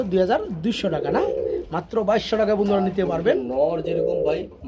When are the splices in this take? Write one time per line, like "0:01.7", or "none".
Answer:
none